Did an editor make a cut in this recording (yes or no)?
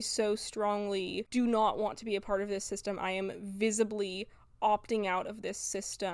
yes